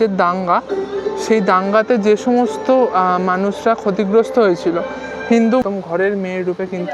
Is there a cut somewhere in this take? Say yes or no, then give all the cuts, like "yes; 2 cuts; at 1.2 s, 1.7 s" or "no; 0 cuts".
yes; 1 cut; at 5.6 s